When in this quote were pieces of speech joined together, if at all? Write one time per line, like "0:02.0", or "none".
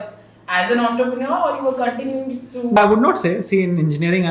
0:02.8